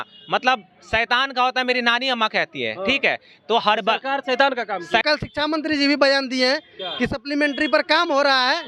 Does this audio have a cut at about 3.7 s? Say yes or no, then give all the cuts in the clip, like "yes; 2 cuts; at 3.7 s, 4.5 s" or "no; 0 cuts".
no; 1 cut; at 5.0 s